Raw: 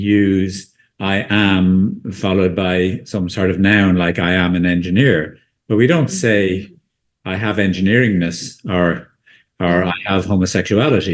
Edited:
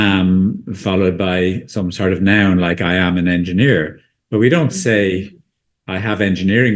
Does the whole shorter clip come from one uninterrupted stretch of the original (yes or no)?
yes